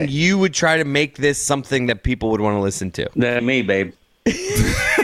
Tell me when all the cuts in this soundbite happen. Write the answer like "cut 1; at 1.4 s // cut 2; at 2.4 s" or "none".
none